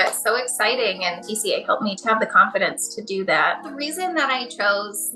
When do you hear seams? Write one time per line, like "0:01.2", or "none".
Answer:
0:01.8
0:03.7